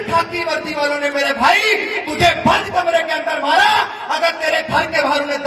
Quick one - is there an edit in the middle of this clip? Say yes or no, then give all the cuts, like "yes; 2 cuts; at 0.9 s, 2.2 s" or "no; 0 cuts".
no; 0 cuts